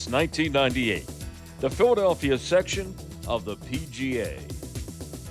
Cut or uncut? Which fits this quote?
cut